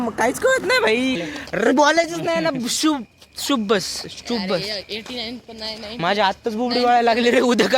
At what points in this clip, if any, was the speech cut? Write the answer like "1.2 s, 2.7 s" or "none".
1.2 s